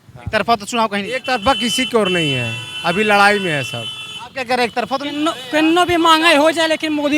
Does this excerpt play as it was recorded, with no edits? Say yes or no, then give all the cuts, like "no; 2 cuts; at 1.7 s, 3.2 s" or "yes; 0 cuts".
yes; 0 cuts